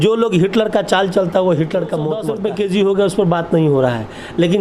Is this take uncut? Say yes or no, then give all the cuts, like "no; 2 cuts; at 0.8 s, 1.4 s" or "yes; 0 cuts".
no; 1 cut; at 2.2 s